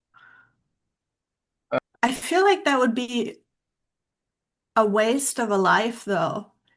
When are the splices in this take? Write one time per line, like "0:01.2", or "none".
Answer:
0:01.8